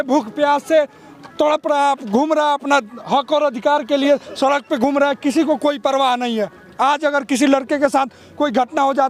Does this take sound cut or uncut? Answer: uncut